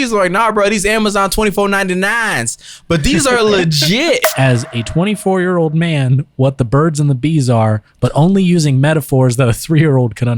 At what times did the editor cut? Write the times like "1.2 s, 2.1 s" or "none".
4.2 s

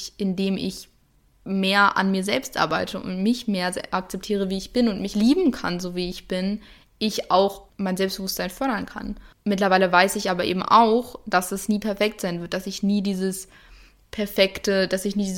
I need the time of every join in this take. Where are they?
5.1 s, 7.6 s, 9.2 s

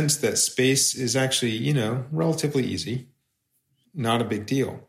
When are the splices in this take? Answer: 3.7 s

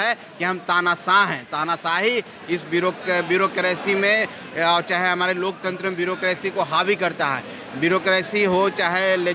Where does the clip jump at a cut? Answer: none

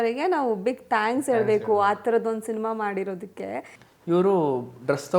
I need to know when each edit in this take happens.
3.7 s

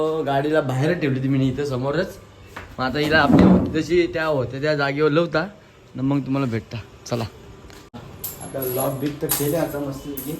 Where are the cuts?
7.8 s

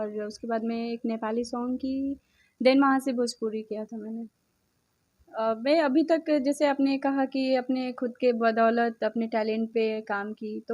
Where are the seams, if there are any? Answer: 5.2 s

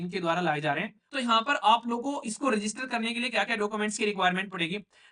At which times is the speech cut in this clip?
1.0 s

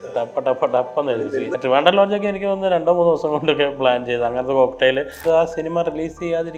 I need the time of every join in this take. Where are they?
1.3 s, 5.2 s

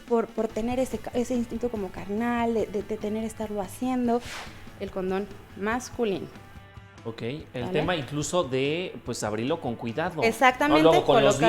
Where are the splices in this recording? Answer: 4.4 s

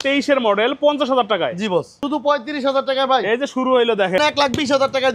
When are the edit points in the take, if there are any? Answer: 2.0 s, 4.2 s

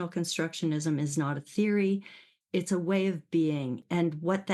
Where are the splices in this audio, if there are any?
2.3 s

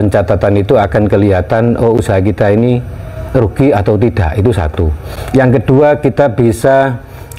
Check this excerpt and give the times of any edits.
none

